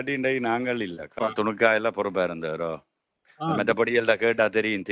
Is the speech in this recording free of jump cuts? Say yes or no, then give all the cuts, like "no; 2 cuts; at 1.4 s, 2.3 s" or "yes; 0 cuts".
no; 1 cut; at 1.2 s